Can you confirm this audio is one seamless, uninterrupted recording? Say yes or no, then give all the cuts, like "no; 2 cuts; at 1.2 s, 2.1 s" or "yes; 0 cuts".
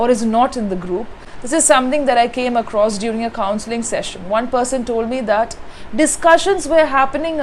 yes; 0 cuts